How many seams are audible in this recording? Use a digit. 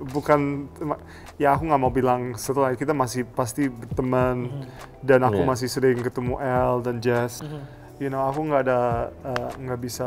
1